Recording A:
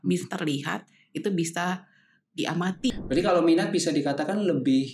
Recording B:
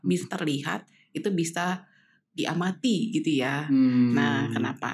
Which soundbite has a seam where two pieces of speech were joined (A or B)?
A